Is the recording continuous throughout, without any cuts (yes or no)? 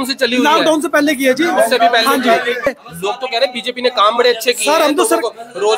no